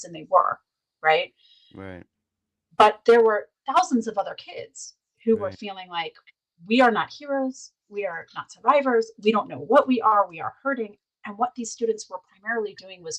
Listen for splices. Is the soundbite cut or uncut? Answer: uncut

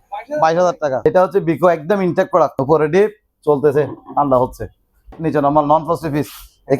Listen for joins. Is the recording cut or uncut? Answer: cut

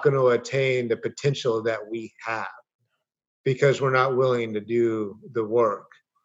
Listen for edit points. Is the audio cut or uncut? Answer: uncut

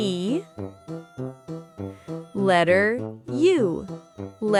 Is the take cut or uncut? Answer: uncut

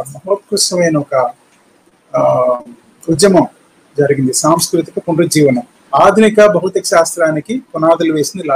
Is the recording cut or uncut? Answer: cut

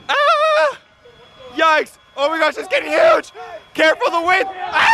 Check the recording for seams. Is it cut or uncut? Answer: uncut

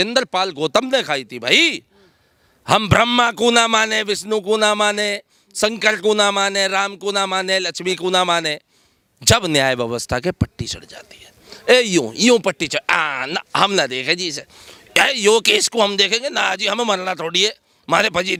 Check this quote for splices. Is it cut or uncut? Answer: uncut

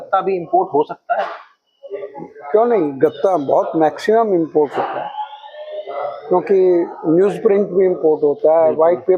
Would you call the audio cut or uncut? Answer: uncut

